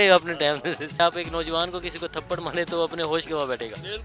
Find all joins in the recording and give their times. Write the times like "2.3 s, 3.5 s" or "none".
1.0 s